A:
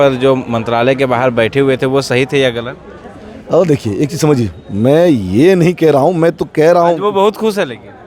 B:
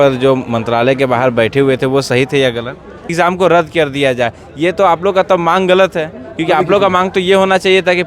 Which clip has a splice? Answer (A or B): B